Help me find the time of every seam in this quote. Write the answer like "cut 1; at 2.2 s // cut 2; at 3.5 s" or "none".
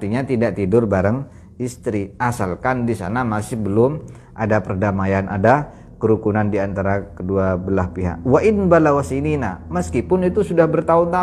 none